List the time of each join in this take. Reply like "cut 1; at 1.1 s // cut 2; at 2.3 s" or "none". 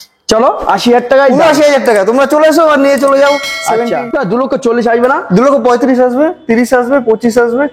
cut 1; at 4.0 s